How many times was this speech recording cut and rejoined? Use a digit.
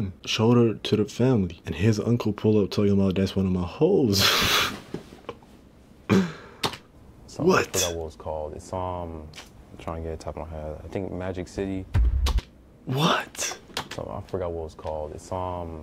0